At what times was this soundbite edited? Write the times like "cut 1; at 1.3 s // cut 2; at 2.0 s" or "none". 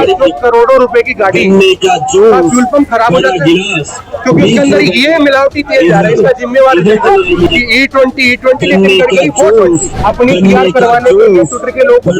cut 1; at 7.5 s // cut 2; at 9.9 s